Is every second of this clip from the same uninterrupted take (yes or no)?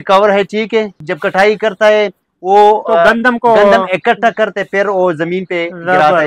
no